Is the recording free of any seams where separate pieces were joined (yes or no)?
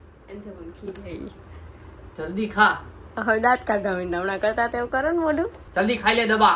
no